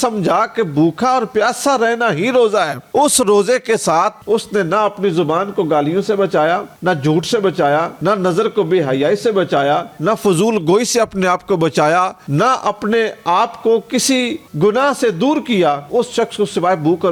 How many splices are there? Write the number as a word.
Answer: zero